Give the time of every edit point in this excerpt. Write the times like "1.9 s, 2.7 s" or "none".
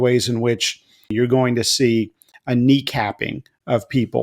1.1 s